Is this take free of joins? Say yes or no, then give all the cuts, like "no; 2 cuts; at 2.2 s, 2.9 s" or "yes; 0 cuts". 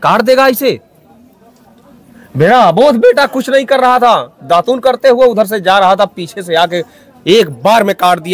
yes; 0 cuts